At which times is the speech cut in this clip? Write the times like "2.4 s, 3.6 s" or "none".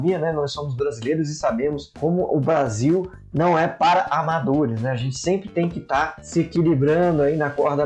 1.9 s, 6.2 s